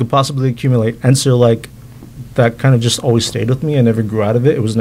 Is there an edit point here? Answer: no; 0 cuts

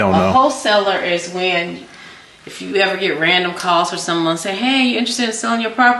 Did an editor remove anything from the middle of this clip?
no; 0 cuts

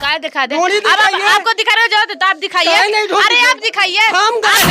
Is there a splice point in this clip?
no; 0 cuts

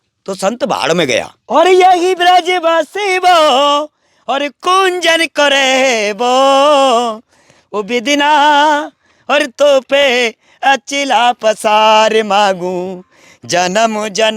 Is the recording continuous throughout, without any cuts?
no; 1 cut; at 1.4 s

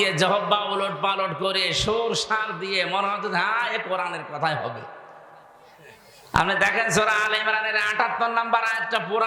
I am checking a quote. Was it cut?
no; 0 cuts

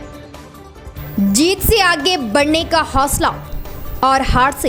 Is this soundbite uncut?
yes; 0 cuts

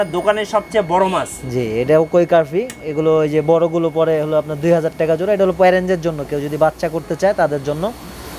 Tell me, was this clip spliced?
no; 0 cuts

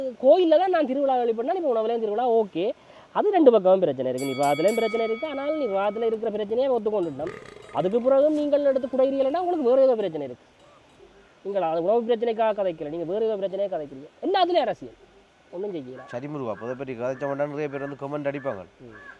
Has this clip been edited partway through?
no; 0 cuts

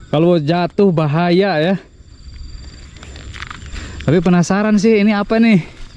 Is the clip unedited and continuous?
no; 1 cut; at 3.8 s

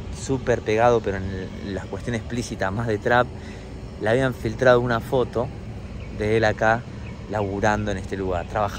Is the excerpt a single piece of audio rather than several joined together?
yes; 0 cuts

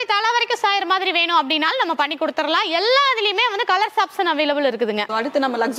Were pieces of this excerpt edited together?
no; 0 cuts

